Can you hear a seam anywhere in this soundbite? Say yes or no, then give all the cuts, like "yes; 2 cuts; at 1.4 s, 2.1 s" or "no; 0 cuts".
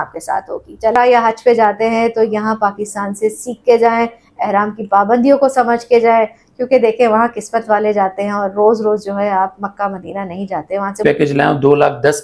yes; 2 cuts; at 0.9 s, 11.0 s